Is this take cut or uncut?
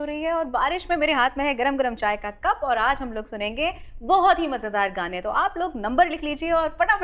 uncut